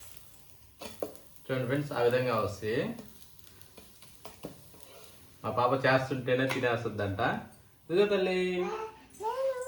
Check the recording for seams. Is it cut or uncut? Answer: uncut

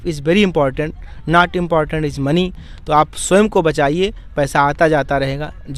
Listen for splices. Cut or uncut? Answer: uncut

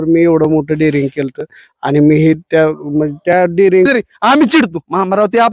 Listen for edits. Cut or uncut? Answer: cut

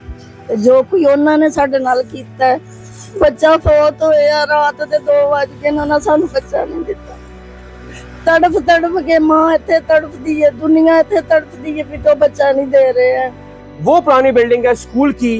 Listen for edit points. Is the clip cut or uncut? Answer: cut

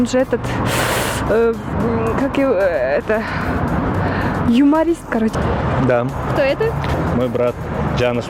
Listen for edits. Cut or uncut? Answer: cut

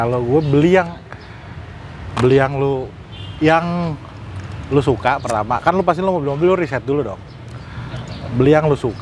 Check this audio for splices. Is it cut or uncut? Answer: uncut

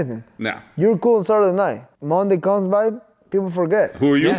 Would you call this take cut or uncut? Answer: cut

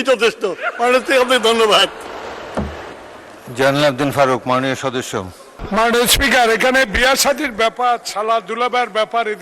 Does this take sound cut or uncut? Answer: cut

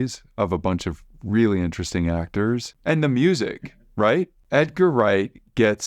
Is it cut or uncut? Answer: cut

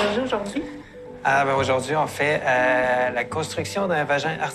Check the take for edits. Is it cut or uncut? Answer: uncut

